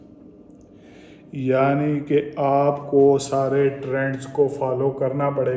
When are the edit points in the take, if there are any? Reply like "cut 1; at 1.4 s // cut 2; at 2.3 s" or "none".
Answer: none